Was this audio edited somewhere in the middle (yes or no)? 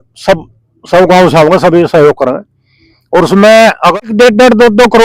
yes